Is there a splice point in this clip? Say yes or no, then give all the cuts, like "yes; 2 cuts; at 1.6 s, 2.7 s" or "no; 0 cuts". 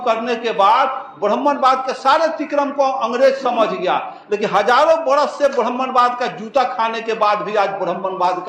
no; 0 cuts